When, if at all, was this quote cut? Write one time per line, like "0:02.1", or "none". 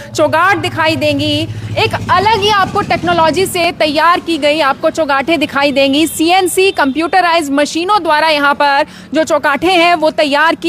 none